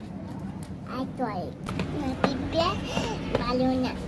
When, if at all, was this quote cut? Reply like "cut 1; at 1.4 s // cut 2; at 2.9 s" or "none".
cut 1; at 1.7 s